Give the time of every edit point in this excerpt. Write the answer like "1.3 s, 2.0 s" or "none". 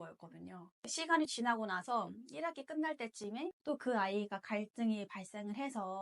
3.6 s